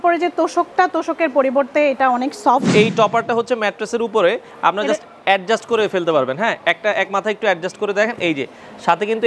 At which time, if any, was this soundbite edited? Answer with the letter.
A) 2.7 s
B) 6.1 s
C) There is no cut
A